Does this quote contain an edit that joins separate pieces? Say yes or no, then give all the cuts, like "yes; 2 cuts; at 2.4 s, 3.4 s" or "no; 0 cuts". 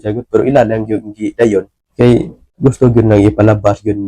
yes; 2 cuts; at 1.8 s, 2.4 s